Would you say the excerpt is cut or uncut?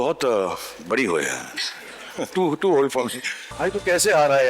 cut